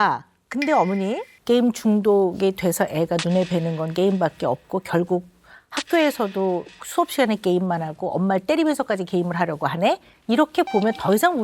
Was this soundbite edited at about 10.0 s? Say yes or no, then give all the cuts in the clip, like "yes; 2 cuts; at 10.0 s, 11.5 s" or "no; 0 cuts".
no; 1 cut; at 1.3 s